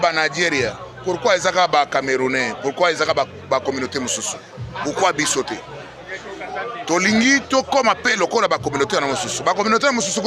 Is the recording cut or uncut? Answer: uncut